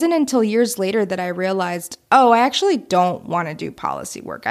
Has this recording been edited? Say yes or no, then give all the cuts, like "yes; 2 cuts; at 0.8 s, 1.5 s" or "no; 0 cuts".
no; 0 cuts